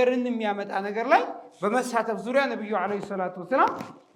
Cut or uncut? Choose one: uncut